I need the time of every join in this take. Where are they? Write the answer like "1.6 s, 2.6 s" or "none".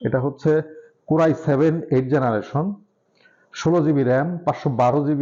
none